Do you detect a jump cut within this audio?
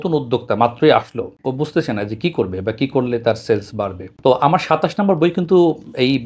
yes; 2 cuts; at 1.3 s, 4.1 s

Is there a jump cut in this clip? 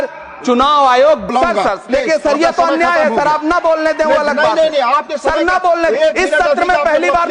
yes; 1 cut; at 1.2 s

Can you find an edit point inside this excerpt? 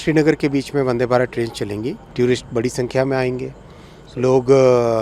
yes; 1 cut; at 2.0 s

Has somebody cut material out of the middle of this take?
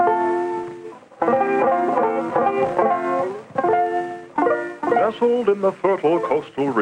no; 0 cuts

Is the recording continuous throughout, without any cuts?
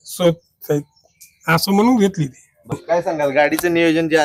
no; 1 cut; at 2.7 s

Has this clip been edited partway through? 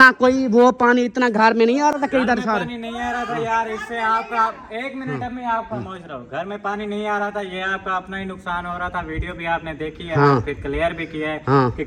no; 0 cuts

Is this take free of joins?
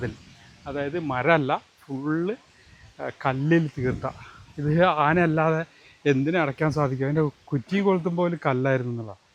yes; 0 cuts

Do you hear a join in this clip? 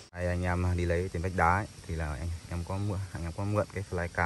no; 0 cuts

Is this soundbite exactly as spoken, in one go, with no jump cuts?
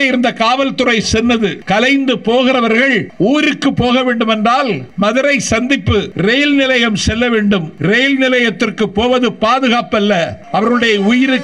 no; 6 cuts; at 1.6 s, 3.1 s, 4.8 s, 6.1 s, 7.7 s, 10.4 s

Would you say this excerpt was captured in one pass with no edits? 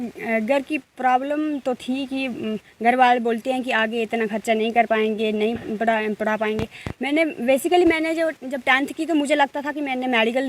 yes; 0 cuts

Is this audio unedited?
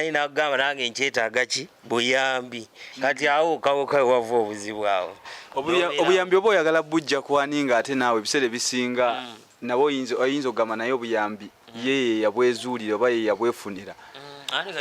yes; 0 cuts

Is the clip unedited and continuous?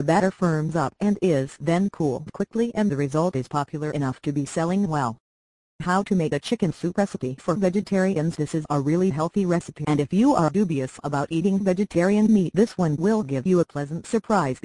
no; 1 cut; at 4.5 s

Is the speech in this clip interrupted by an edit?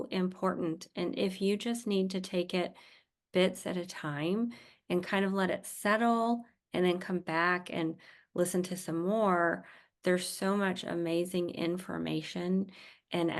no; 0 cuts

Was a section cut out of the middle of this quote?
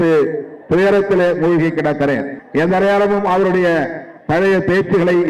yes; 1 cut; at 2.4 s

